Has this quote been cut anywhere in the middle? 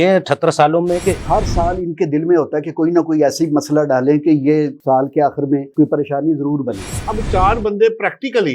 yes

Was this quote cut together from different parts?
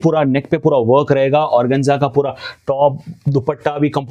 no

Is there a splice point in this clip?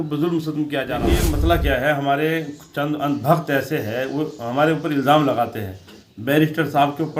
yes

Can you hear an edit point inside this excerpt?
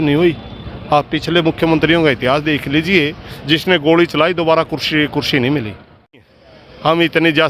yes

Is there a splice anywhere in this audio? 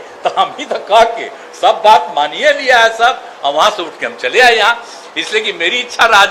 no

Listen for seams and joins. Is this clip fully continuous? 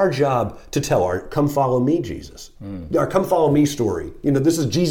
yes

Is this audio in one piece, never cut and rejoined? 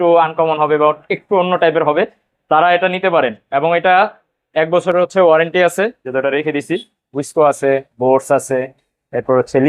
no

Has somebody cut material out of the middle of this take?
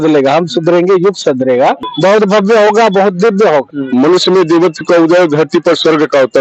yes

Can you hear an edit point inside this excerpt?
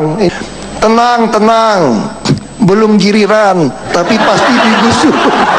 no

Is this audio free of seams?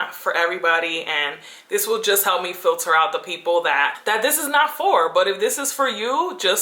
no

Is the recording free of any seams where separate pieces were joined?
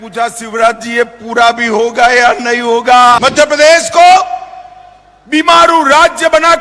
no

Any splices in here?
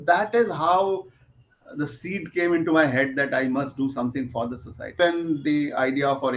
yes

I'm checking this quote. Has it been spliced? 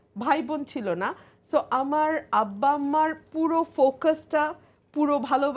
no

